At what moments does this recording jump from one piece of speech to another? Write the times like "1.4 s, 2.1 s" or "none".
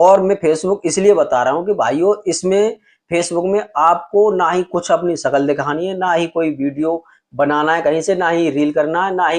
none